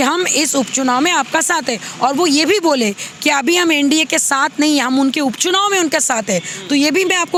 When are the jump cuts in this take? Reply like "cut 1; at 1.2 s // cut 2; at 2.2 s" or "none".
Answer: none